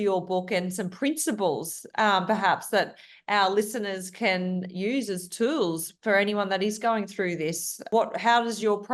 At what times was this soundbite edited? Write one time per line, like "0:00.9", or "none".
0:07.8